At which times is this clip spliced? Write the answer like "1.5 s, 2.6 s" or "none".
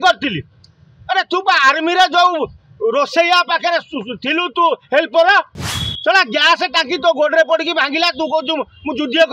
none